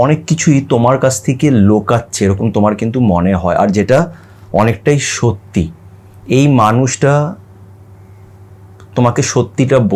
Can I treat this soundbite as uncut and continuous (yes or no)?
yes